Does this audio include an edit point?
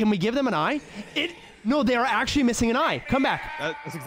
no; 0 cuts

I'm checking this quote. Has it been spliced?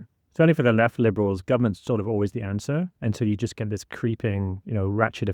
no; 0 cuts

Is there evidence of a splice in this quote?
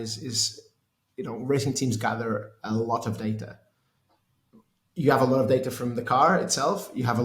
no; 0 cuts

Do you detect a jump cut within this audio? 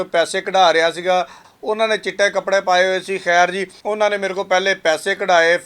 yes; 2 cuts; at 1.5 s, 3.7 s

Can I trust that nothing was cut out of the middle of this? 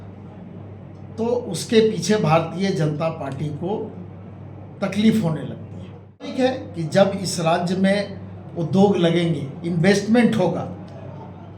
no; 1 cut; at 6.3 s

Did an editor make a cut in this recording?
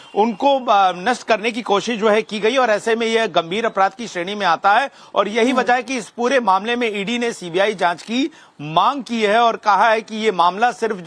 yes; 1 cut; at 1.9 s

